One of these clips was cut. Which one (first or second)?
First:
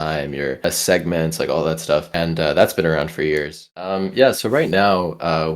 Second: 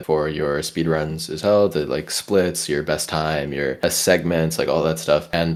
first